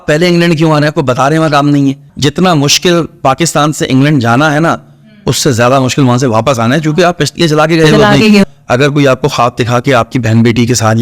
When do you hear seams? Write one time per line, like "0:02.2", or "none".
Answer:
0:02.1
0:08.4